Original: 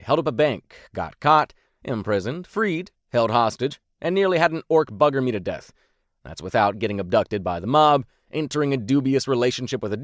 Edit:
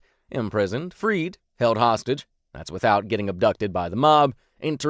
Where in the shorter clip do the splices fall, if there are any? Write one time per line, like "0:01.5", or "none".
0:02.3

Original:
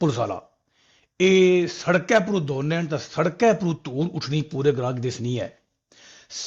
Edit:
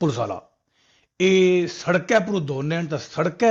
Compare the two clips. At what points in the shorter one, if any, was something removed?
none

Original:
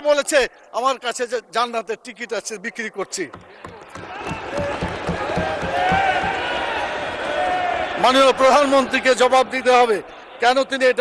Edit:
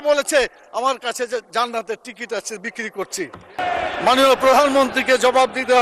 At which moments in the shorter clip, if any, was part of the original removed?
0:03.6

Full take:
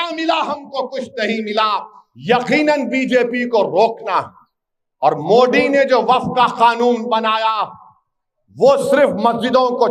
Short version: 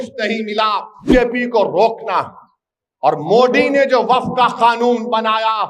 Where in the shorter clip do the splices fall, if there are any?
0:01.1

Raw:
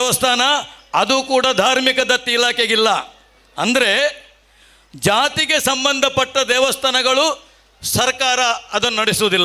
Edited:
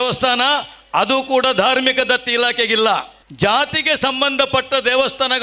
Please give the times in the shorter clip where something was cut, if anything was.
0:03.2

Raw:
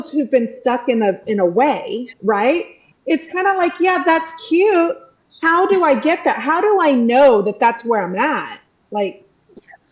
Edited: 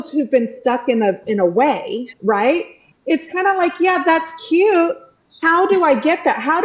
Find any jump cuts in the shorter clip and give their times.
none

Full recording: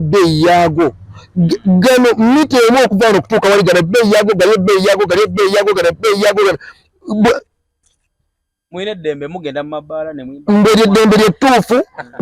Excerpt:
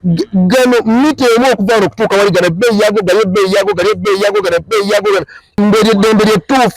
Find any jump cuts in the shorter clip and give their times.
0:05.4

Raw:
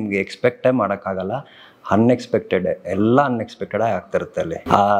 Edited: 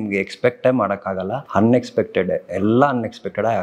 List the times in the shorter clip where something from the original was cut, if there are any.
0:01.4

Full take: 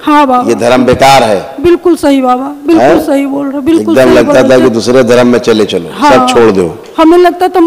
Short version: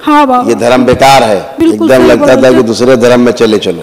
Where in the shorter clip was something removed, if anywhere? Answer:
0:01.5

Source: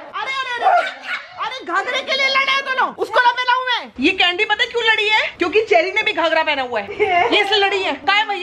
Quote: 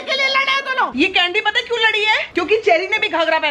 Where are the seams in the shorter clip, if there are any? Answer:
0:00.9

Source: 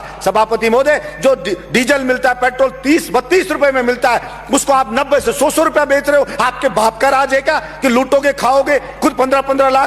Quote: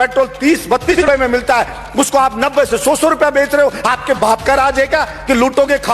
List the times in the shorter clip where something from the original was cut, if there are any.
0:00.9

